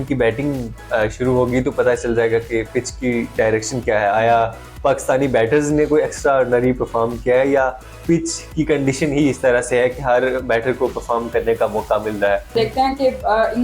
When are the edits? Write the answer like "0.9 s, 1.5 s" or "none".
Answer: 12.5 s